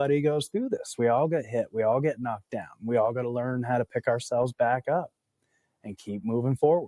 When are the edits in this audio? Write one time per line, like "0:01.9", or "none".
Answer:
none